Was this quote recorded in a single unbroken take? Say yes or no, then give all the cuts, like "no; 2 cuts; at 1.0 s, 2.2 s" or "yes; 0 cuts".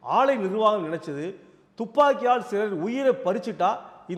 yes; 0 cuts